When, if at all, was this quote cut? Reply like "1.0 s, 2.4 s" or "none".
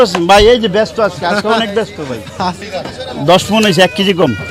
2.6 s